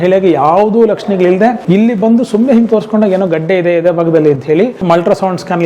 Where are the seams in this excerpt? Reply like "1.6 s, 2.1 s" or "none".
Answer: 1.6 s, 4.8 s

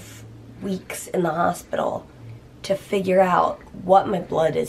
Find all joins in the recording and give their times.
none

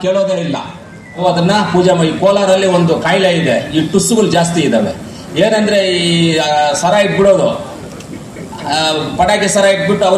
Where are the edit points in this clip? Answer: 1.2 s

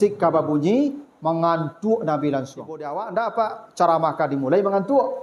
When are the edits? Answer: 3.0 s

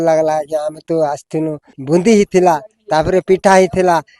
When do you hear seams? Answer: 1.7 s

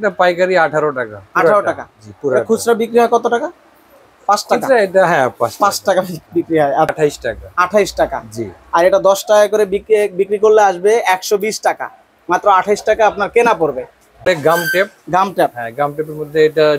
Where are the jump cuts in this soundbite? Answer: 6.9 s, 14.2 s

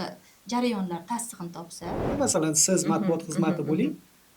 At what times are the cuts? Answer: 2.0 s

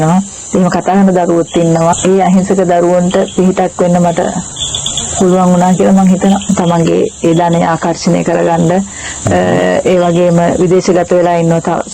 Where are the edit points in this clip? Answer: 1.9 s, 6.4 s

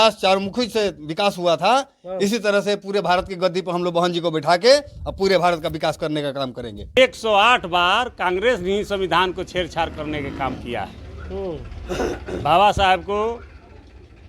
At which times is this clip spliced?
7.0 s

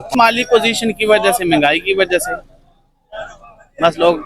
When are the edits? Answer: none

